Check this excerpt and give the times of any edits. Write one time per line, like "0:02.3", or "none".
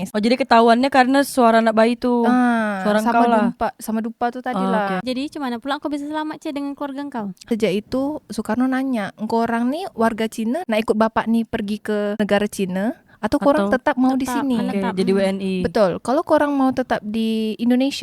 0:07.5

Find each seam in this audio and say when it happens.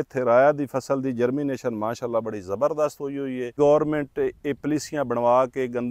0:03.5

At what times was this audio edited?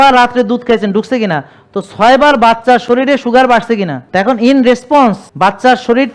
0:04.0
0:05.3

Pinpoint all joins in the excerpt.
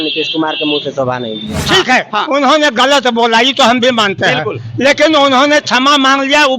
0:01.6

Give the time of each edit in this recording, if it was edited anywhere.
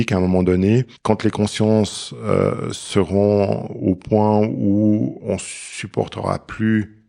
0:00.9

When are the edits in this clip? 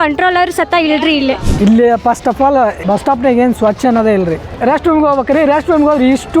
0:01.5
0:02.8
0:04.5

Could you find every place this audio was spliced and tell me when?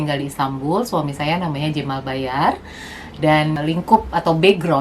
0:03.6

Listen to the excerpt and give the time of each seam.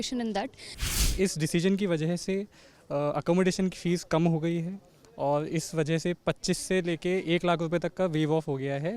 0:01.0

